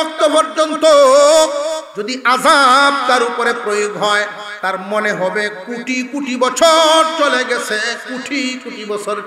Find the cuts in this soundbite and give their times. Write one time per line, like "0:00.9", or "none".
0:01.9
0:04.4